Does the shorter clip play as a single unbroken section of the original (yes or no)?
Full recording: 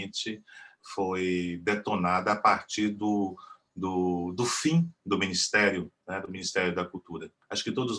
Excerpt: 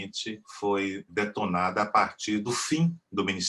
no